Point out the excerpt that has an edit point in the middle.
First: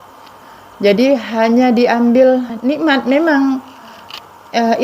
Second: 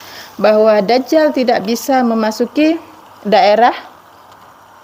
first; 1 cut; at 2.5 s

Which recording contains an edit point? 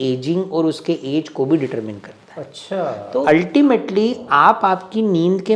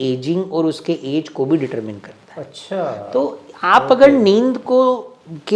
first; 1 cut; at 3.3 s

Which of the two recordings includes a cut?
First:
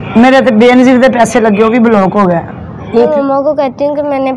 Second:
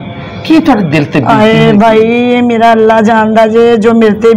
first; 1 cut; at 3.1 s

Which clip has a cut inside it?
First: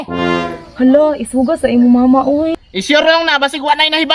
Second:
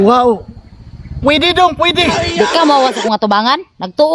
first; 1 cut; at 2.6 s

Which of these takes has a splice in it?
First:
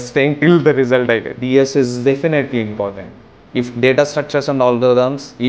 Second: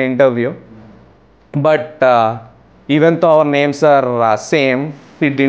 first; 1 cut; at 1.4 s

